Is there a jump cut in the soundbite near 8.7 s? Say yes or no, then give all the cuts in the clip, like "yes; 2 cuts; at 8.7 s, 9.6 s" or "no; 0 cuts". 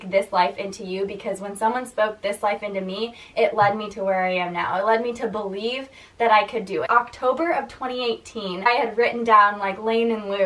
yes; 2 cuts; at 6.9 s, 8.7 s